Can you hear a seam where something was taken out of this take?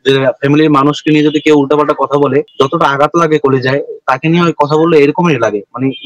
no; 0 cuts

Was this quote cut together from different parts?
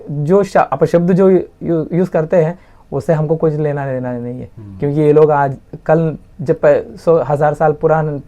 no; 0 cuts

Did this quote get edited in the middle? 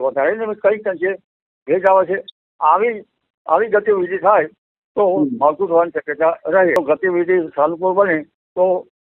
yes; 1 cut; at 6.8 s

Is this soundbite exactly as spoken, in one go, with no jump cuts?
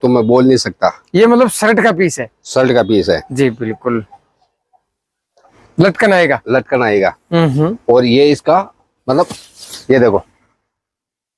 no; 1 cut; at 5.6 s

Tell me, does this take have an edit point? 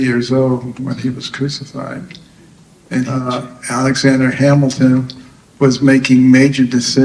yes; 1 cut; at 3.3 s

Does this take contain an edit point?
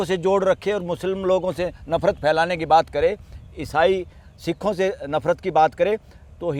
no; 0 cuts

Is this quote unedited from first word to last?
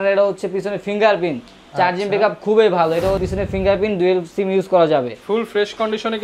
no; 1 cut; at 3.2 s

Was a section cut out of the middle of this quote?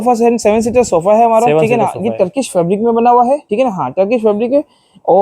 yes; 1 cut; at 3.5 s

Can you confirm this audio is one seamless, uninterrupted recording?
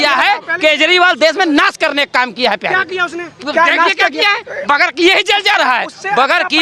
yes; 0 cuts

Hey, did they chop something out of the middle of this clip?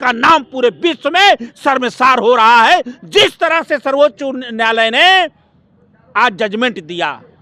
no; 0 cuts

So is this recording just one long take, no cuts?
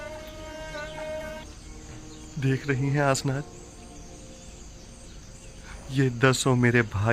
no; 1 cut; at 1.4 s

